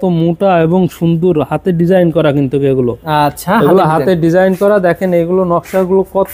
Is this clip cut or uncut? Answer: uncut